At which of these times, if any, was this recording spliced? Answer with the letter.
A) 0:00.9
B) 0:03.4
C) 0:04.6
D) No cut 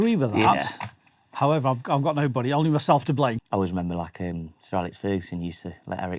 B